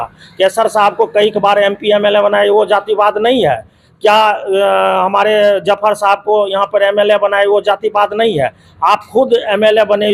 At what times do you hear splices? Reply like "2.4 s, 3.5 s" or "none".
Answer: none